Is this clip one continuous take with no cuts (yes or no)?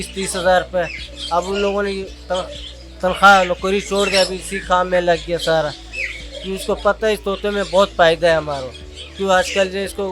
yes